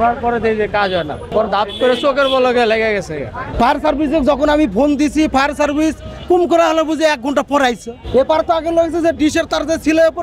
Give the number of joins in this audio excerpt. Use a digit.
3